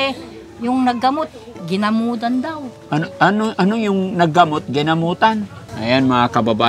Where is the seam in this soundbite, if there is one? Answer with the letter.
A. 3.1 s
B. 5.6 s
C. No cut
B